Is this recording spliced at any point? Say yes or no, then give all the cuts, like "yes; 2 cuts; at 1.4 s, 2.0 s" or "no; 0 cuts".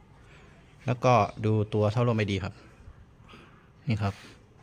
no; 0 cuts